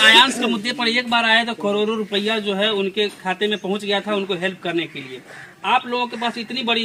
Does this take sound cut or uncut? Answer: uncut